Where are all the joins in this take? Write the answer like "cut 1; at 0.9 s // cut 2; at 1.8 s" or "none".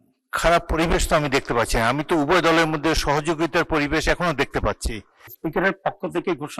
cut 1; at 5.4 s